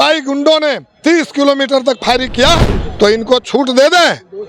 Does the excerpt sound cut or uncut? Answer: cut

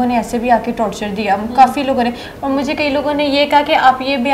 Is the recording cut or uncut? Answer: uncut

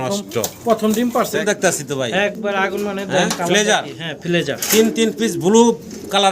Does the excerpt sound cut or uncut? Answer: cut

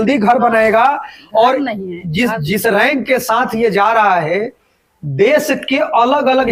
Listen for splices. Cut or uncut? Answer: uncut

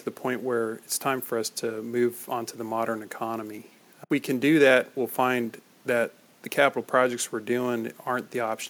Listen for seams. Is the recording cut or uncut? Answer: uncut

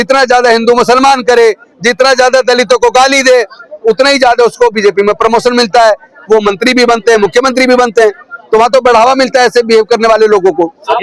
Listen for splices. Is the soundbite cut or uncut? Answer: uncut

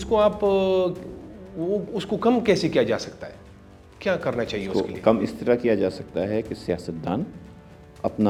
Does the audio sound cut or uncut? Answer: uncut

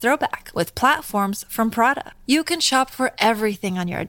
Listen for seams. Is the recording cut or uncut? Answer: uncut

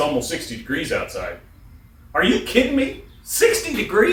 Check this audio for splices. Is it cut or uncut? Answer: uncut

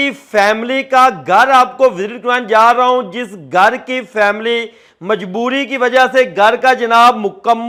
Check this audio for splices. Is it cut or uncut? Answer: uncut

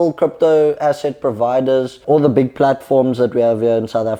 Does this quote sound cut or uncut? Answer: uncut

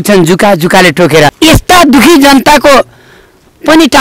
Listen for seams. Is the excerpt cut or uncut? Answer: cut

